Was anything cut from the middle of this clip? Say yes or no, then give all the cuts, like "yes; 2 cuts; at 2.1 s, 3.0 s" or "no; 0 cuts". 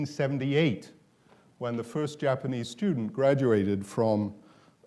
yes; 1 cut; at 1.9 s